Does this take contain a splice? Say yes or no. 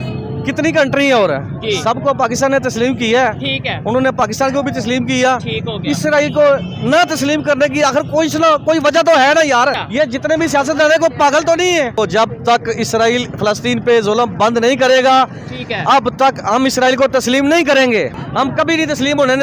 yes